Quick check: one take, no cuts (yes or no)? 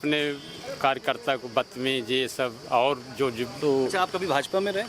no